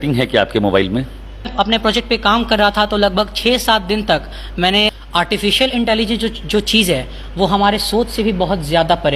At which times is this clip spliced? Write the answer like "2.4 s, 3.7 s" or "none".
1.5 s, 4.9 s